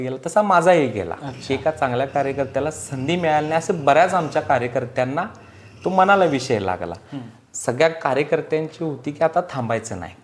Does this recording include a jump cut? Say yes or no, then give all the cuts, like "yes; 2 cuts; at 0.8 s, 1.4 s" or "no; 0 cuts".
no; 0 cuts